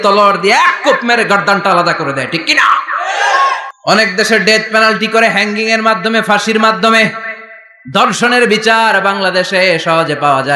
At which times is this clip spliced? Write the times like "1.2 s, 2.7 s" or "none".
3.7 s